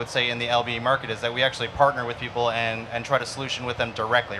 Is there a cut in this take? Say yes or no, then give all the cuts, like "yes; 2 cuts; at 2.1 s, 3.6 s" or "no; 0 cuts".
no; 0 cuts